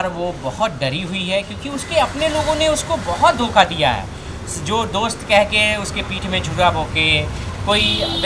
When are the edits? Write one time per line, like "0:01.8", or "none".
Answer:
none